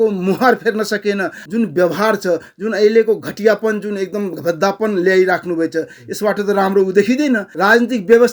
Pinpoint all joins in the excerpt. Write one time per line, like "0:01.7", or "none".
0:01.4
0:07.5